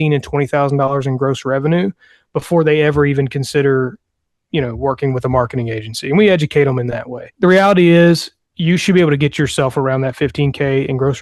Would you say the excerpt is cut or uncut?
cut